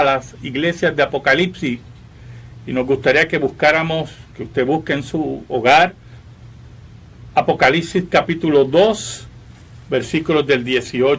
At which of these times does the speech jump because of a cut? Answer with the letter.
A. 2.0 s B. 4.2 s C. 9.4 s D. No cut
B